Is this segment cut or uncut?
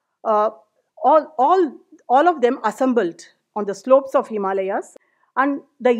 cut